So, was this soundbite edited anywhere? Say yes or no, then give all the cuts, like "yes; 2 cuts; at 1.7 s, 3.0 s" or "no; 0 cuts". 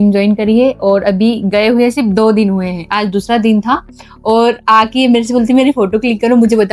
no; 0 cuts